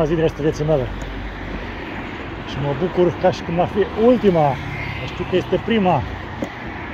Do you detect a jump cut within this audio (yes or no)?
no